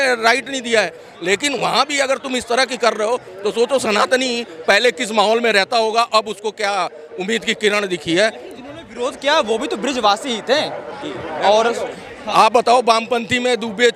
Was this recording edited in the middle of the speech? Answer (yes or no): no